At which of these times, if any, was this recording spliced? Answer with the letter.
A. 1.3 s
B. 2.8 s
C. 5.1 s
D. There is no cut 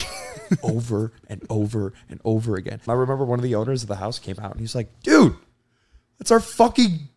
B